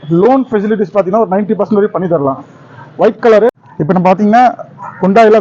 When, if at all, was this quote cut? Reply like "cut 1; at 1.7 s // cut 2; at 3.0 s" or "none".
cut 1; at 3.6 s